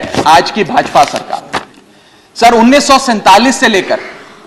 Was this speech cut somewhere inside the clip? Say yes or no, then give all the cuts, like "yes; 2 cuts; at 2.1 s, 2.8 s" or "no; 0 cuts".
yes; 1 cut; at 1.6 s